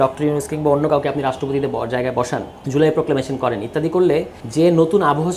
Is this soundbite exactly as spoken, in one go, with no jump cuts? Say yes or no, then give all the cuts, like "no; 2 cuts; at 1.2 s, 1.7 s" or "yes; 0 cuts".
no; 2 cuts; at 2.5 s, 4.4 s